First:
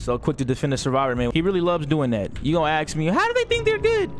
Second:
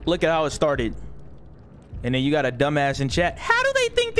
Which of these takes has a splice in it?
first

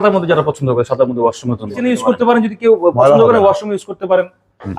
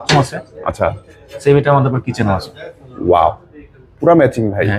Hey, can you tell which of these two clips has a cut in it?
first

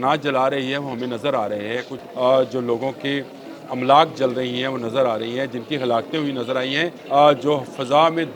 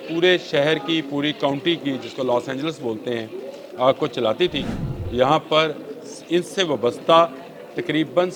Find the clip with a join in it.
first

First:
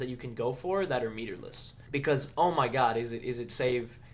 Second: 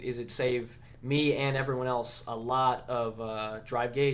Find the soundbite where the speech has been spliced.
first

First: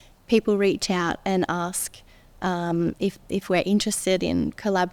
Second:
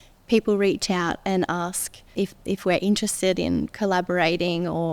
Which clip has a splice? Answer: second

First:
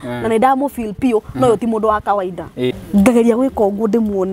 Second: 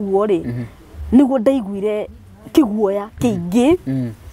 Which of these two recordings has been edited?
first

